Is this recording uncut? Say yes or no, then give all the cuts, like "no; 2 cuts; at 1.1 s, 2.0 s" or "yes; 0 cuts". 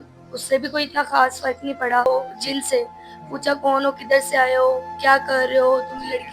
no; 1 cut; at 2.1 s